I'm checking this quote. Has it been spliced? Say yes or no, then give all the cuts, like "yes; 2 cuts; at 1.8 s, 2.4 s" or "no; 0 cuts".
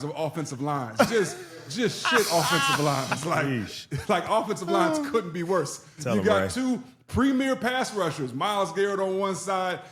no; 0 cuts